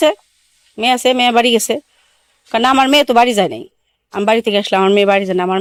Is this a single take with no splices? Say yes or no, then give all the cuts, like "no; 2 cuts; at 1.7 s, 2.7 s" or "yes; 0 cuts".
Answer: yes; 0 cuts